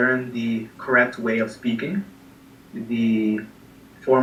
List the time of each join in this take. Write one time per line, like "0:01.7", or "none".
none